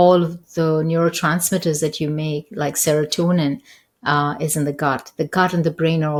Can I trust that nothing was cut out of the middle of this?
yes; 0 cuts

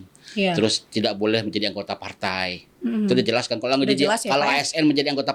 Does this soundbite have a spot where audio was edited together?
no; 0 cuts

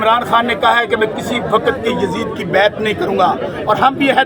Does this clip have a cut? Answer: no; 0 cuts

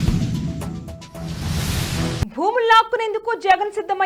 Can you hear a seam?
no; 0 cuts

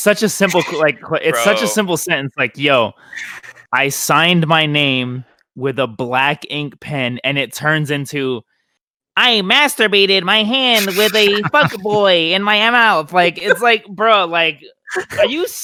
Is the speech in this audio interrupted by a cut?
no; 0 cuts

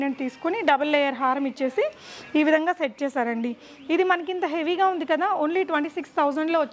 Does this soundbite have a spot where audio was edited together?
no; 0 cuts

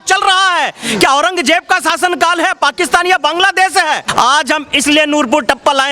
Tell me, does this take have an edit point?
yes; 1 cut; at 4.1 s

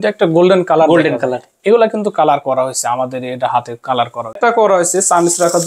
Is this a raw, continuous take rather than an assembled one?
no; 1 cut; at 4.4 s

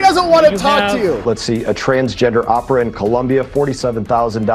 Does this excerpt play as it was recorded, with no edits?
no; 1 cut; at 1.2 s

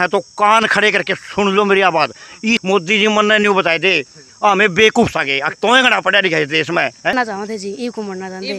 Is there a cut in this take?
yes; 2 cuts; at 2.6 s, 7.1 s

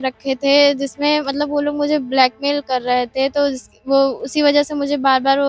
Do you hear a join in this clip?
no; 0 cuts

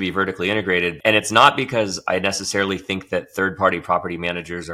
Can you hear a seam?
yes; 1 cut; at 0.9 s

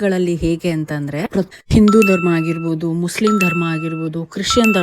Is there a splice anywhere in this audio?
yes; 1 cut; at 1.5 s

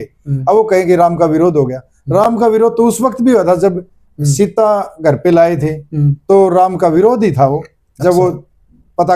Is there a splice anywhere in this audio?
no; 0 cuts

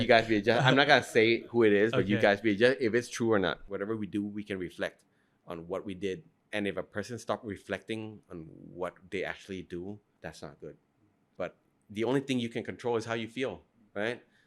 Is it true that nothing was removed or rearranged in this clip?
no; 4 cuts; at 3.6 s, 6.3 s, 10.1 s, 11.3 s

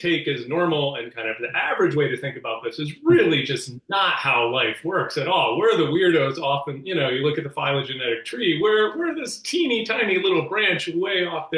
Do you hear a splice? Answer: no; 0 cuts

